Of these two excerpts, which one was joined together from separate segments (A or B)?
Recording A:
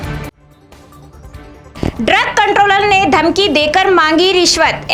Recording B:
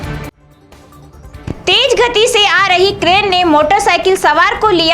B